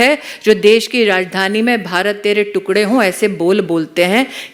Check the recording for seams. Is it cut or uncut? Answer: uncut